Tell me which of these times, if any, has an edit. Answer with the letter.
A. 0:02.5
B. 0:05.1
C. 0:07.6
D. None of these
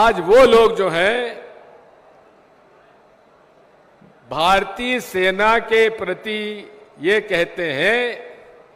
D